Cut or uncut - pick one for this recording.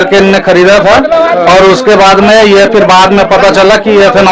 uncut